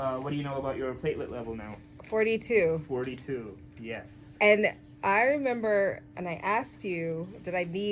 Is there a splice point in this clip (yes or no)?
no